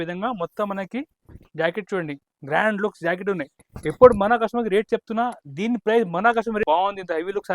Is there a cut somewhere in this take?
yes; 1 cut; at 6.6 s

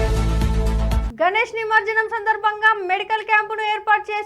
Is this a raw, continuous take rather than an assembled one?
no; 1 cut; at 1.0 s

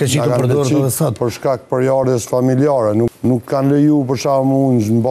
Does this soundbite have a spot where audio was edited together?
yes; 1 cut; at 3.1 s

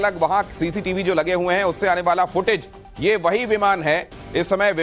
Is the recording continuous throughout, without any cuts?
yes; 0 cuts

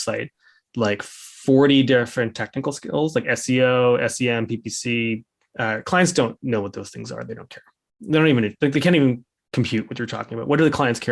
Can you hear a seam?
no; 0 cuts

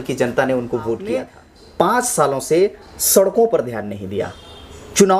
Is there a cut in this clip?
yes; 1 cut; at 1.1 s

